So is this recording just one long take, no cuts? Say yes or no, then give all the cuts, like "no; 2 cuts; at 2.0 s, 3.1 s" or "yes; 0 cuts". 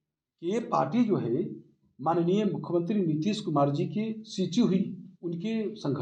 yes; 0 cuts